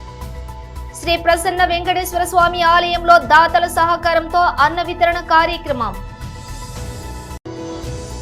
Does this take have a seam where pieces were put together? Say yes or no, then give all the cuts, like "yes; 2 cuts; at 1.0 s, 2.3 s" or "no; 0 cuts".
yes; 2 cuts; at 1.0 s, 6.0 s